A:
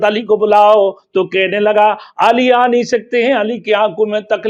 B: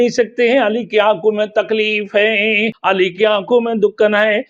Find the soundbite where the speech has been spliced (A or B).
B